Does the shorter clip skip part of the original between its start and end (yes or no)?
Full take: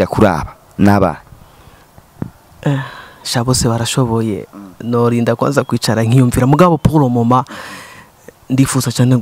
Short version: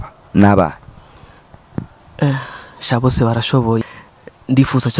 yes